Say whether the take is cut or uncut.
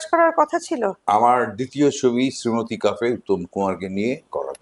uncut